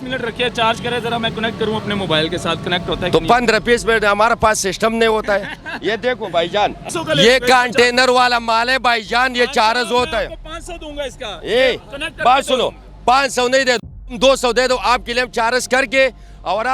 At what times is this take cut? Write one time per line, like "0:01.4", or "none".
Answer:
0:06.9